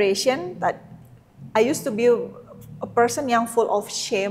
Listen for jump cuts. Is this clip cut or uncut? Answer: uncut